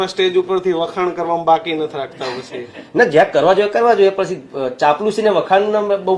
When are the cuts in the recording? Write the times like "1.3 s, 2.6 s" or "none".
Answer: none